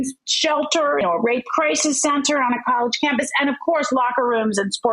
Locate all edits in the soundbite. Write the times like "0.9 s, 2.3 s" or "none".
1.0 s